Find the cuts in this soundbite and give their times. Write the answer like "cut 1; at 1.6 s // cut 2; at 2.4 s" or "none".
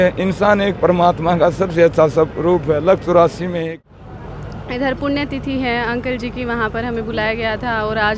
cut 1; at 3.7 s